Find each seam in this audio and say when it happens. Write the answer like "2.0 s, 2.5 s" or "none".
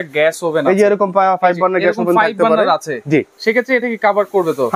none